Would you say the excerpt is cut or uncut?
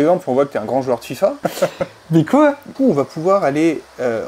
uncut